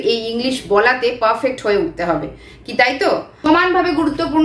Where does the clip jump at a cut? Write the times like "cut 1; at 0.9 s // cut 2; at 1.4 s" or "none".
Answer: cut 1; at 3.5 s